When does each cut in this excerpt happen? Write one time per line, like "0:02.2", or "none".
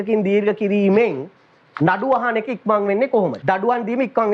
0:03.4